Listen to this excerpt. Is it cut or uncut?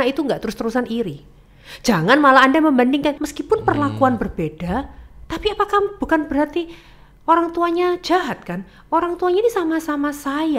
cut